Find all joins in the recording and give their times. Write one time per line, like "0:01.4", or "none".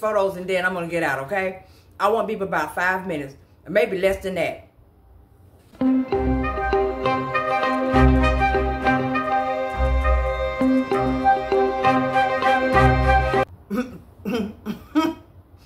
0:05.8
0:10.5
0:13.4